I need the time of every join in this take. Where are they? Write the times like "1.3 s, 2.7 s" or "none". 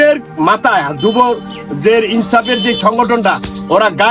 none